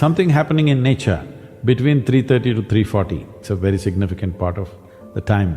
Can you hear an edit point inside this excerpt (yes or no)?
yes